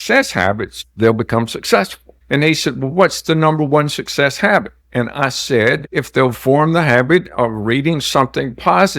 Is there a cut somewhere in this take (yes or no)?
no